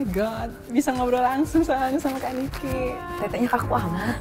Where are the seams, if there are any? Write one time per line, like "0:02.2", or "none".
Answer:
none